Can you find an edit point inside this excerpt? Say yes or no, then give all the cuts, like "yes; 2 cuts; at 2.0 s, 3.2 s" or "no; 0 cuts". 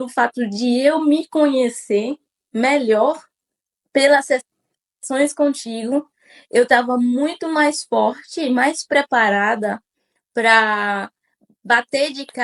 no; 0 cuts